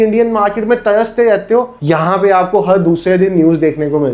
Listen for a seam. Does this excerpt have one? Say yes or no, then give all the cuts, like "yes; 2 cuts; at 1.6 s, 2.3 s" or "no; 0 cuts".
yes; 1 cut; at 1.8 s